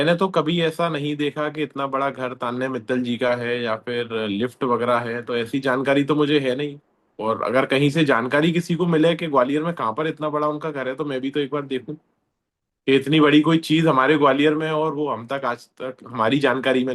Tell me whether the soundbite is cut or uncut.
uncut